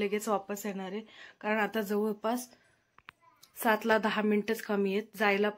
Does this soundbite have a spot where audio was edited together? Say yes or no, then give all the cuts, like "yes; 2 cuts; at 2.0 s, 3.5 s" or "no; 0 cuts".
no; 0 cuts